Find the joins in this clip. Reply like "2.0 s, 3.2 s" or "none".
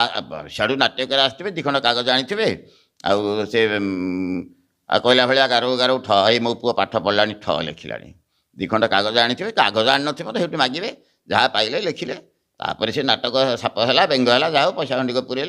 none